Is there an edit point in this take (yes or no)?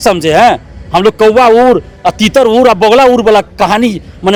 no